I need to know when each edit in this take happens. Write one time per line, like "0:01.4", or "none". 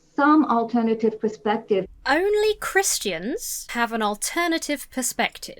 0:01.9
0:03.6